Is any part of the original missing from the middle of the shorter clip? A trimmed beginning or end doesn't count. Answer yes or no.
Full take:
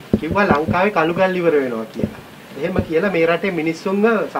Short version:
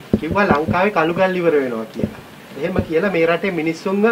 no